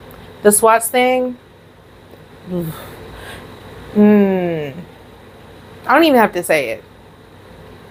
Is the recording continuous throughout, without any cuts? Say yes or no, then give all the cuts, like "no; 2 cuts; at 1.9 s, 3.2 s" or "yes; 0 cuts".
yes; 0 cuts